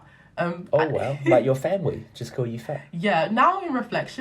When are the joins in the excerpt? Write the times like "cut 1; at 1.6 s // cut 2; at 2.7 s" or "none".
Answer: none

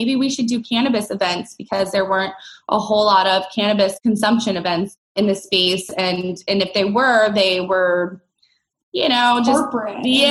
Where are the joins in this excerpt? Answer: cut 1; at 4.0 s // cut 2; at 5.0 s

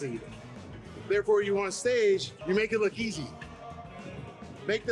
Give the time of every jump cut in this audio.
cut 1; at 2.3 s

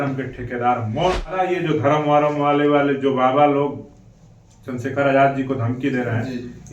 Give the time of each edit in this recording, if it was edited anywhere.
cut 1; at 1.5 s

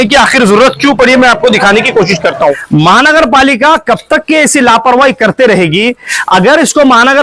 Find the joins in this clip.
cut 1; at 2.6 s

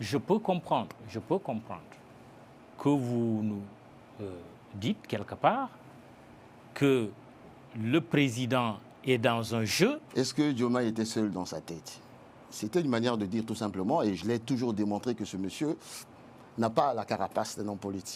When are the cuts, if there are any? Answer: cut 1; at 10.0 s

